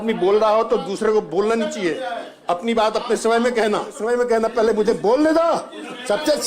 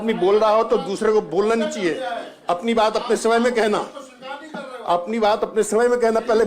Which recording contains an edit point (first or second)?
first